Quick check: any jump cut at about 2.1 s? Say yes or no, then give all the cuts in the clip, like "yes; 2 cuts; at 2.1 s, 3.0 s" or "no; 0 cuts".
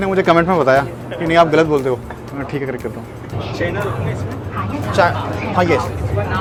no; 0 cuts